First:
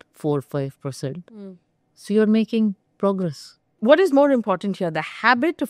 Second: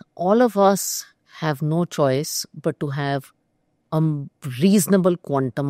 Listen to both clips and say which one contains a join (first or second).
first